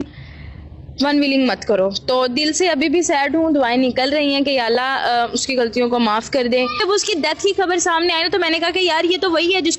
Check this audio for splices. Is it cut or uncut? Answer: cut